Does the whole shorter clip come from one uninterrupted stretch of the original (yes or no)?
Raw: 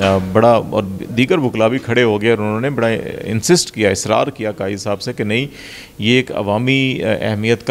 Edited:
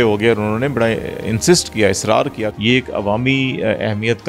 no